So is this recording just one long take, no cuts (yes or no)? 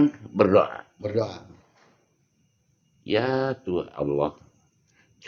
yes